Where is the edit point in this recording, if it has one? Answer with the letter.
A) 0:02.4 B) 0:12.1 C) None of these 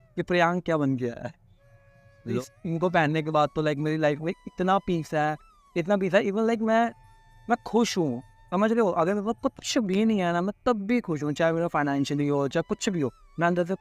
A